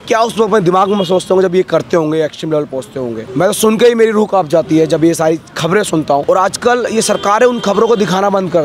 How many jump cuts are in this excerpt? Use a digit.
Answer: 2